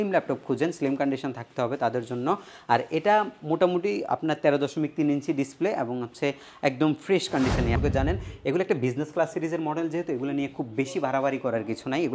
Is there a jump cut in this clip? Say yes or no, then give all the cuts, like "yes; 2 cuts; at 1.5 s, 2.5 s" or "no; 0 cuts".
yes; 1 cut; at 7.7 s